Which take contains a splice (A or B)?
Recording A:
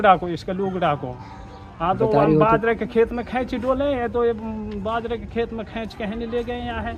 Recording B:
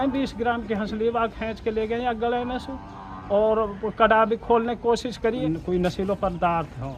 B